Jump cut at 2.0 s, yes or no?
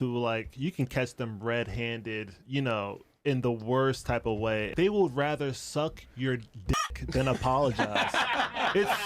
no